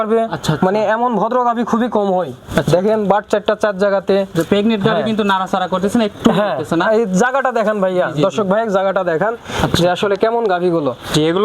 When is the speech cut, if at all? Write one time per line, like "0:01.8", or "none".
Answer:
none